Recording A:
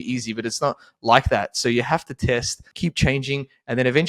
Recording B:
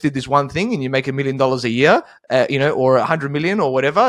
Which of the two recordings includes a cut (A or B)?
A